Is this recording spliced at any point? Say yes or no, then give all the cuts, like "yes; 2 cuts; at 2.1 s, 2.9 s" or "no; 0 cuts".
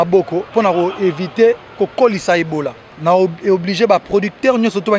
yes; 1 cut; at 2.8 s